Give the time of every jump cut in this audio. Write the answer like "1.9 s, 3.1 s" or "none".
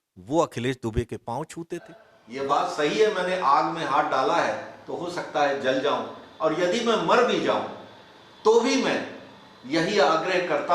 2.1 s